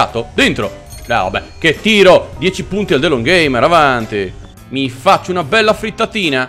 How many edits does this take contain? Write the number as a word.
one